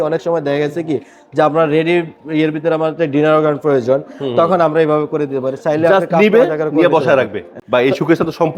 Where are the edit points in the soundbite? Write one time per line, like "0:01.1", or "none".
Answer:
0:07.5